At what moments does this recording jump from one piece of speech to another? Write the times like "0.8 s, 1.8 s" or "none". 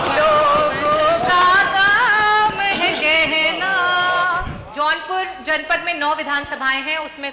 4.6 s

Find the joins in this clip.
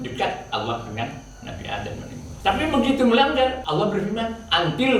2.3 s, 3.6 s

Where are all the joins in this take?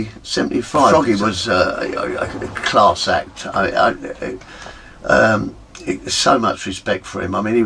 0.9 s

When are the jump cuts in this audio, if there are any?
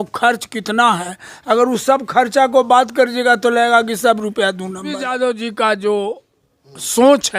5.0 s

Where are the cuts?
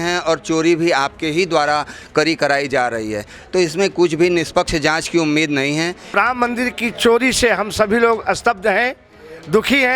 6.2 s

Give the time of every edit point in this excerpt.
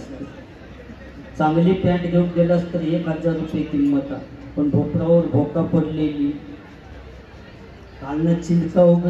none

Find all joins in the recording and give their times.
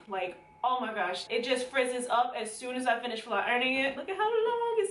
1.2 s, 4.0 s

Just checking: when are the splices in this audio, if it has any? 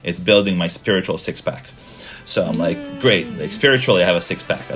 none

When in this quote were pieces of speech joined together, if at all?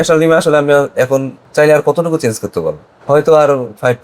1.4 s, 2.9 s

